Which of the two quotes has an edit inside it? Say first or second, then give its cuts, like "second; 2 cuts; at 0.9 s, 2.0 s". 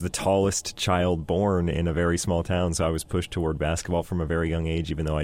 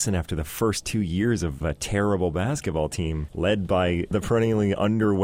second; 3 cuts; at 1.6 s, 3.2 s, 4.1 s